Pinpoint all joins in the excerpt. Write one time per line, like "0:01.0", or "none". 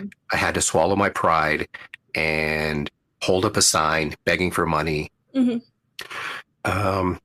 0:05.2